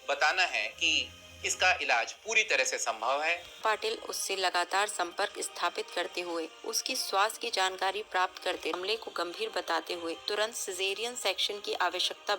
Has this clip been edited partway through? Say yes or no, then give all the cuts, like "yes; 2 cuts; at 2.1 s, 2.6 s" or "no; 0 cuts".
yes; 2 cuts; at 3.6 s, 8.8 s